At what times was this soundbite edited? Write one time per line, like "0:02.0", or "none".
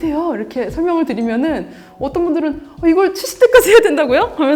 none